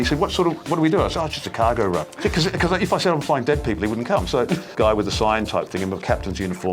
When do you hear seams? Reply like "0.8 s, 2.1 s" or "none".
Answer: 2.1 s, 4.7 s